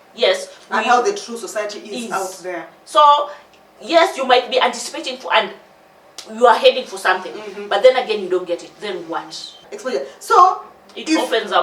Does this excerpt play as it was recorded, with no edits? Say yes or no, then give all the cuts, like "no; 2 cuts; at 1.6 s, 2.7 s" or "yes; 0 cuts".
no; 1 cut; at 9.7 s